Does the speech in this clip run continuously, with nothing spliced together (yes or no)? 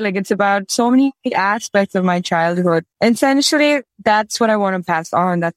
yes